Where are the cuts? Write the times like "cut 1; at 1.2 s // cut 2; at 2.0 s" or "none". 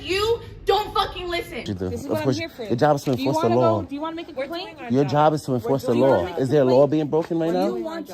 cut 1; at 1.7 s